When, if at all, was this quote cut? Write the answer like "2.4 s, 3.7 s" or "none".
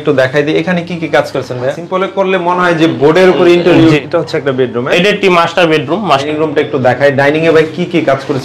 1.7 s, 4.0 s, 6.2 s

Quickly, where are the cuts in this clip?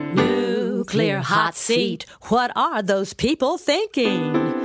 none

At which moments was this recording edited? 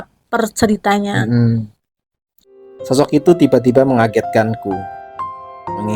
2.5 s

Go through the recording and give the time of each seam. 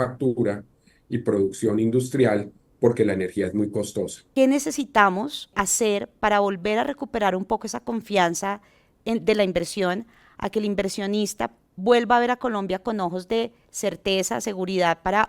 4.2 s, 5.5 s

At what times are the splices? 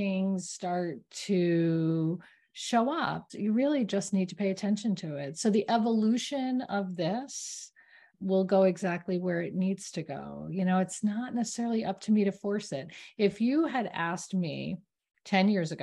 3.3 s, 8.1 s

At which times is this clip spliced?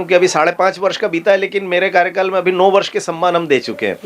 none

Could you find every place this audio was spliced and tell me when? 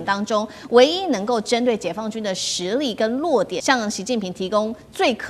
3.6 s

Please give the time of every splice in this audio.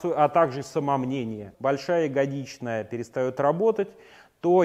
1.5 s

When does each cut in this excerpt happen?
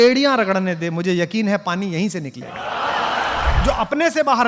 3.5 s

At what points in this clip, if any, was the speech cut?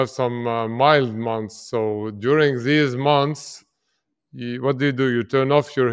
none

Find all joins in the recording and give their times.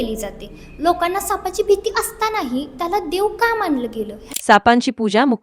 4.2 s

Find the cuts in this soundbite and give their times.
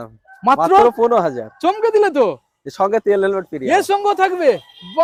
none

